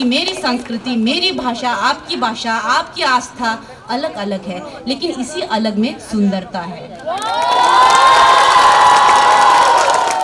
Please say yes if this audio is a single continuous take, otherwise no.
yes